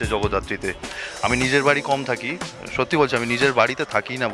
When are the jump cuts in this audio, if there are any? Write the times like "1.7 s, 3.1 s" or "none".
1.0 s